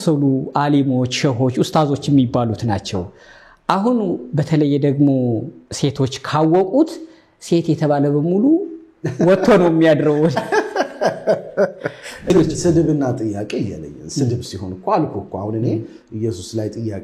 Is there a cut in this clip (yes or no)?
yes